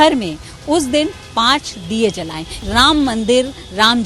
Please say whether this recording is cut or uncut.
cut